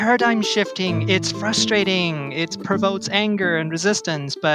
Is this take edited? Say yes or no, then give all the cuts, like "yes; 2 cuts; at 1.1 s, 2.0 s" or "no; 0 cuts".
yes; 1 cut; at 1.0 s